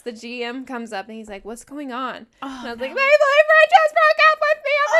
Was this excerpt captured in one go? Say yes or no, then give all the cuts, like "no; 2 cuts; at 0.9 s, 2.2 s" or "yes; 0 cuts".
yes; 0 cuts